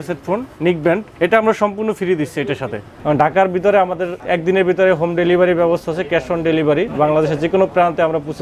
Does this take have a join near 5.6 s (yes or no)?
no